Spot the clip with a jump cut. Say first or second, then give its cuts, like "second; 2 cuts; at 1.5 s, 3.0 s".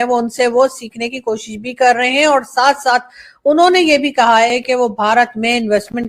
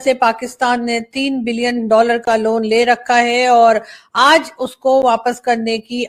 first; 1 cut; at 4.6 s